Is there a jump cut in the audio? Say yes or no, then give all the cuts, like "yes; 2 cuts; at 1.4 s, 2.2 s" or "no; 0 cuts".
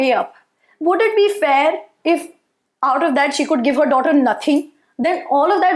no; 0 cuts